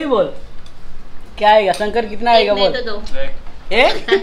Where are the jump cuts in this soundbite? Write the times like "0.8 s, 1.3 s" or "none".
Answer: none